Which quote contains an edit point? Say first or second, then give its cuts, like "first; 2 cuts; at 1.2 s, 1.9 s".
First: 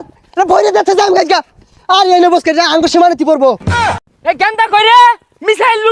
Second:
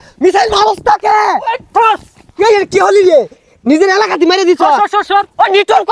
first; 1 cut; at 4.0 s